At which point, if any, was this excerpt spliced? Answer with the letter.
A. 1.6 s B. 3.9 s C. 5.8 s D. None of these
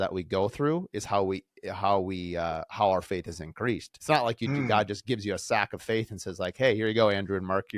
B